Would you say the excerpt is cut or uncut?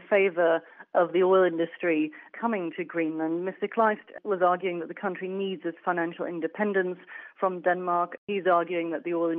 cut